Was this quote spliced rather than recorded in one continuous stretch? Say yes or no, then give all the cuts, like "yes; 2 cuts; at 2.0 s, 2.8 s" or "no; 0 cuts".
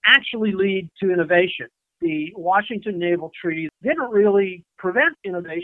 yes; 2 cuts; at 1.9 s, 3.7 s